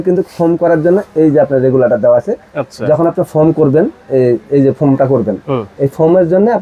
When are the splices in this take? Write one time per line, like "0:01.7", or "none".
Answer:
none